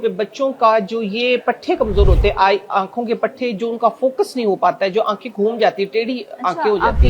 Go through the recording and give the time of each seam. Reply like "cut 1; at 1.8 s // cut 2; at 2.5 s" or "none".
none